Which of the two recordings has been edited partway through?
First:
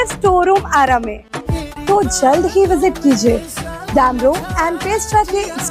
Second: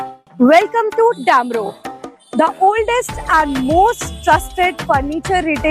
first; 1 cut; at 1.5 s

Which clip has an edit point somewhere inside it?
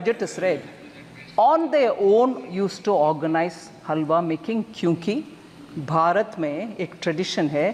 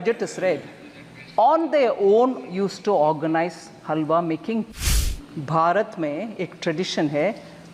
second; 1 cut; at 4.8 s

